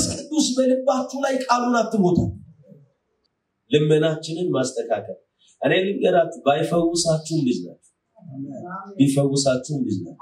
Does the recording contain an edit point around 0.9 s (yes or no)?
no